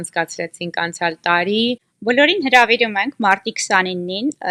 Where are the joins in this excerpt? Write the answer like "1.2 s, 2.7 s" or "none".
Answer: 1.9 s